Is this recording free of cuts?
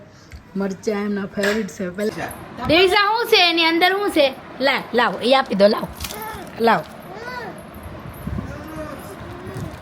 no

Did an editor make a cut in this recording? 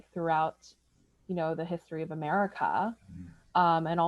no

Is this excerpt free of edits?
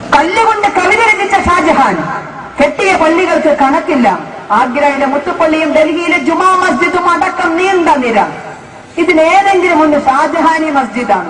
yes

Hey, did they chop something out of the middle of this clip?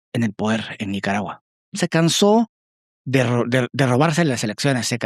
yes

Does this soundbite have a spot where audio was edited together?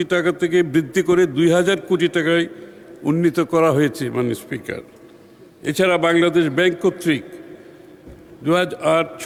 no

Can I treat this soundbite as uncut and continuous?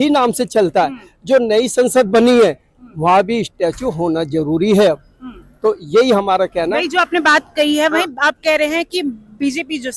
yes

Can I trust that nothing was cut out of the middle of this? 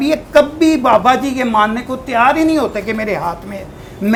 yes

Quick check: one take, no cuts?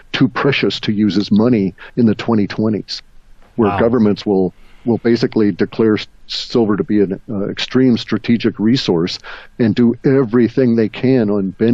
yes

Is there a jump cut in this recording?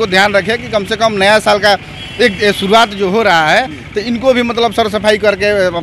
no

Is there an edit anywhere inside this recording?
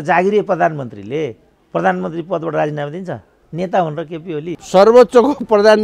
yes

